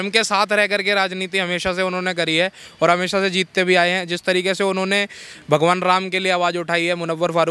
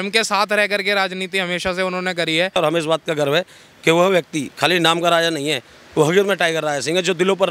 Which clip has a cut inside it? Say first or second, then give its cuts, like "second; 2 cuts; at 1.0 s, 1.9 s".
second; 1 cut; at 2.6 s